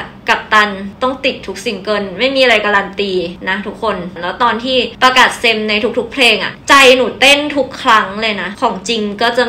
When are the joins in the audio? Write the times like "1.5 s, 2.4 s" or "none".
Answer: 0.9 s, 3.7 s, 8.5 s